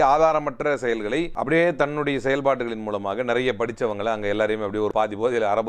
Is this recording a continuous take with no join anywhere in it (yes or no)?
no